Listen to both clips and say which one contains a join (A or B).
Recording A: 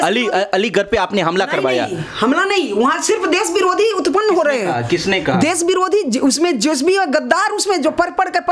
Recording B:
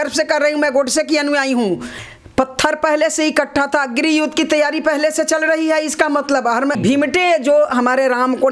B